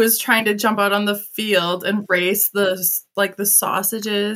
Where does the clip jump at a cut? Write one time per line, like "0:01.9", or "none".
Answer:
none